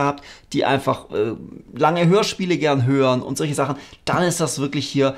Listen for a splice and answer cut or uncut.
uncut